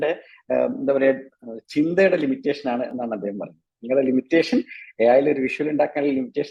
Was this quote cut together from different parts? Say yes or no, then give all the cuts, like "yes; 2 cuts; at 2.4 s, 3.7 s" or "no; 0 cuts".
no; 0 cuts